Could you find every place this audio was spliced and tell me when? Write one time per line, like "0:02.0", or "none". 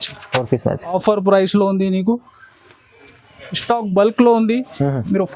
0:00.9